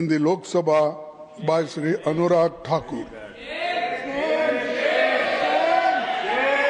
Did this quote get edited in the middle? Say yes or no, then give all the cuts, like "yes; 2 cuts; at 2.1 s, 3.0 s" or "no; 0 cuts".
no; 0 cuts